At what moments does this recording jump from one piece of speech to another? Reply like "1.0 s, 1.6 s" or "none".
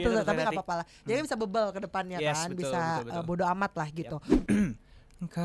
4.3 s